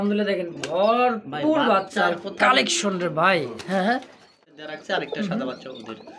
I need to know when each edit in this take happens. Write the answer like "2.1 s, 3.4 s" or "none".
4.4 s

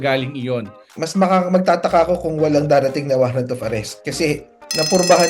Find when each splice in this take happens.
0.9 s, 4.0 s

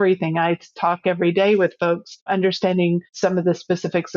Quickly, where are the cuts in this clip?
2.2 s, 3.1 s

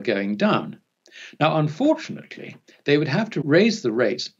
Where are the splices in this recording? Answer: 3.4 s

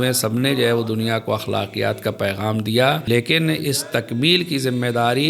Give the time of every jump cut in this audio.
3.0 s

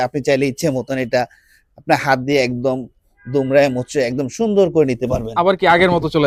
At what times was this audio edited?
none

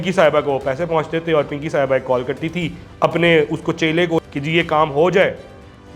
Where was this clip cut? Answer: 4.2 s

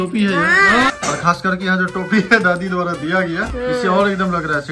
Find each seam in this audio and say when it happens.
0.9 s, 3.5 s

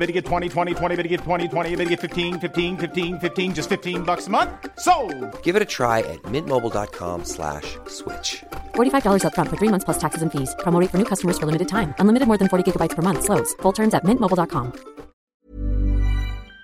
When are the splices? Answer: 15.2 s

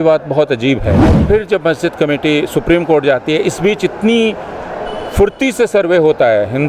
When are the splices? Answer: 1.1 s

